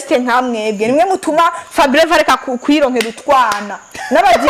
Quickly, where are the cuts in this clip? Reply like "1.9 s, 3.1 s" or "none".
none